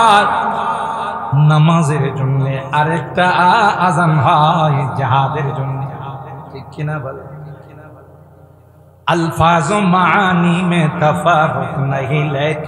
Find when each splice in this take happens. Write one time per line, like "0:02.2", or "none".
none